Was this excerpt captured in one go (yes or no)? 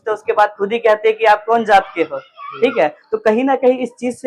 yes